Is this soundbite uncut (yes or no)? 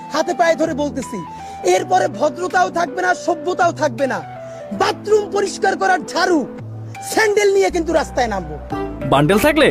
yes